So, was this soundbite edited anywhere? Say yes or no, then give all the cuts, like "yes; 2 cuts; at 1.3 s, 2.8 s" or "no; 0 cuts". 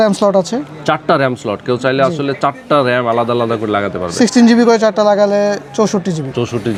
no; 0 cuts